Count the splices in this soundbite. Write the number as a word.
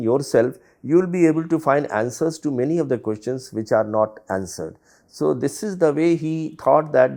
zero